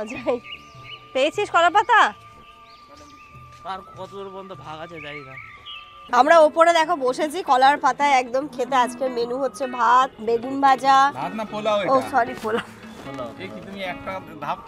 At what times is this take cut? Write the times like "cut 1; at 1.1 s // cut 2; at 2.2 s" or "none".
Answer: cut 1; at 6.0 s // cut 2; at 10.2 s